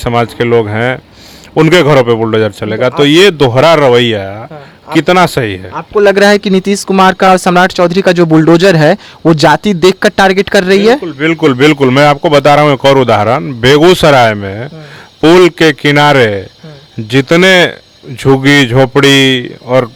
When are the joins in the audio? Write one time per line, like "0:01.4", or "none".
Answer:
none